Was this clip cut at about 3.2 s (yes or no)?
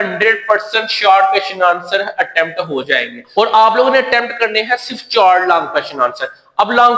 yes